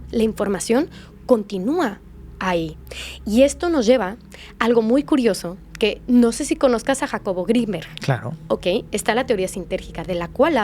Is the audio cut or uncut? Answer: uncut